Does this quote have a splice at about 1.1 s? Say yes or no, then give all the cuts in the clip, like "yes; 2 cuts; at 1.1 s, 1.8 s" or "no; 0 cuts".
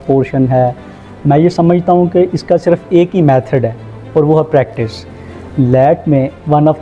yes; 2 cuts; at 1.1 s, 5.4 s